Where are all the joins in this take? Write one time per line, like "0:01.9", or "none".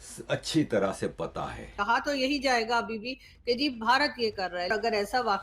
0:01.7
0:04.7